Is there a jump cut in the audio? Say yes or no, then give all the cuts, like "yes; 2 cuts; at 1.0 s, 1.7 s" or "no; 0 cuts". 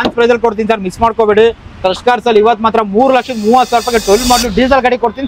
no; 0 cuts